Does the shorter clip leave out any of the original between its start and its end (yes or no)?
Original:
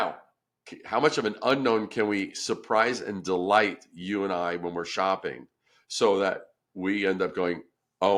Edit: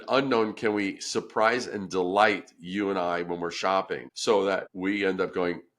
yes